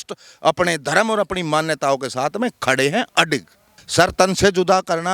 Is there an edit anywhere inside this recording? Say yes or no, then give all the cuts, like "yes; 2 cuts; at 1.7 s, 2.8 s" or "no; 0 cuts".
yes; 1 cut; at 3.8 s